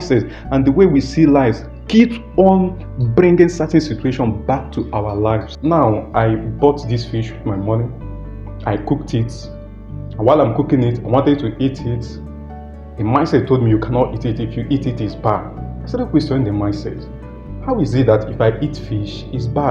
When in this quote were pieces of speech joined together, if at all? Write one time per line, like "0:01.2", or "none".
0:05.5